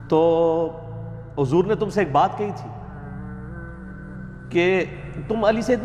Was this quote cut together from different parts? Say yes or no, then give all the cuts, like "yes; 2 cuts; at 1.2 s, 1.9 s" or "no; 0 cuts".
no; 0 cuts